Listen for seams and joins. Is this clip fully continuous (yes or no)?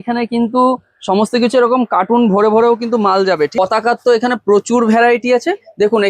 no